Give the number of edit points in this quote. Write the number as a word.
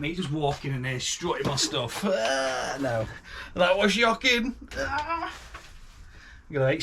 one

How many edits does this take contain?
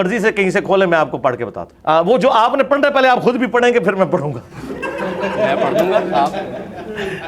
one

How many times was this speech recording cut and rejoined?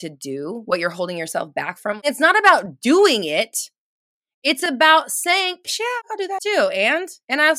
two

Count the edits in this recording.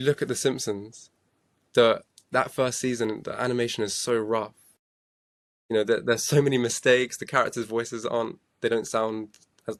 zero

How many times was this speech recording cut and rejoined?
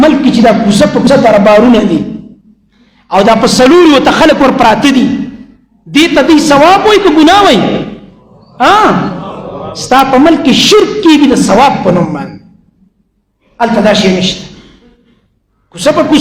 one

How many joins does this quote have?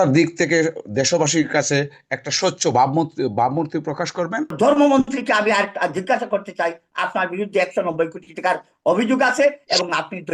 one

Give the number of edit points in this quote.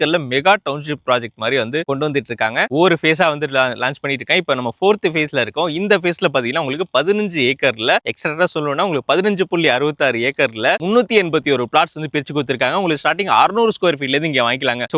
zero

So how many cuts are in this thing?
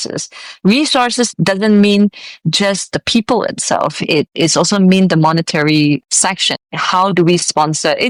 zero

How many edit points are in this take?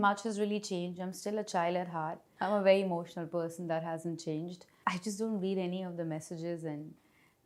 two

